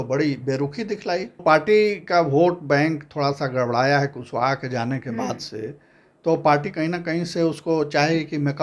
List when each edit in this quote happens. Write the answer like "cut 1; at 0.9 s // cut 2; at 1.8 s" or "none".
cut 1; at 1.4 s

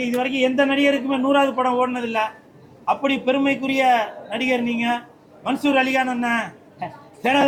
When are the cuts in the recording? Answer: none

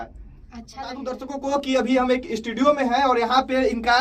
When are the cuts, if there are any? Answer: cut 1; at 1.3 s

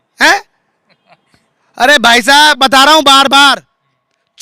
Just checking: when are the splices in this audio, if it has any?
cut 1; at 2.6 s

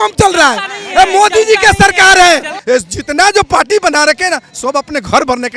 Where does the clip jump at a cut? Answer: cut 1; at 2.5 s

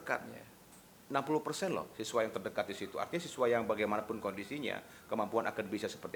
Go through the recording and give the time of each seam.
none

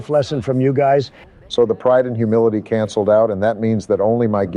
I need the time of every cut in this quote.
cut 1; at 1.2 s

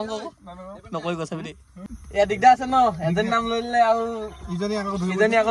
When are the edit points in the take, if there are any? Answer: cut 1; at 1.7 s

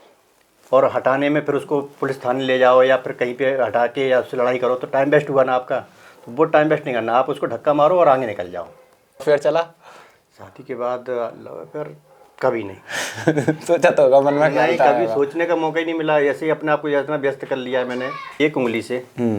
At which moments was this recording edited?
cut 1; at 9.2 s // cut 2; at 18.3 s

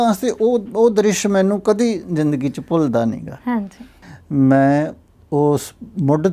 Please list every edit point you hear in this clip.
cut 1; at 3.9 s

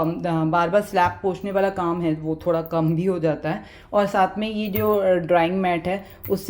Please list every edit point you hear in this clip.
none

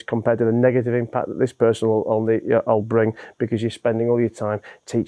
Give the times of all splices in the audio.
none

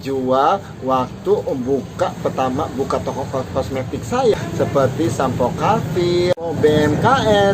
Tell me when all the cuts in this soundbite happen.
cut 1; at 4.3 s // cut 2; at 6.3 s

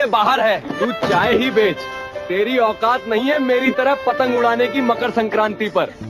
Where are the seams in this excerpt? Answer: cut 1; at 3.8 s

